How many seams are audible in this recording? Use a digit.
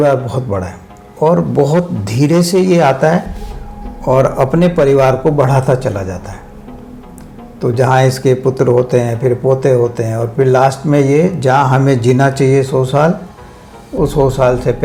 0